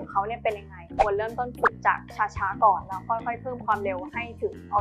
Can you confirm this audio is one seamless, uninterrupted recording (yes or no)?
no